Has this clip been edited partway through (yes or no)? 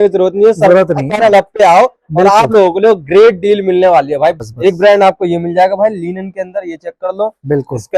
yes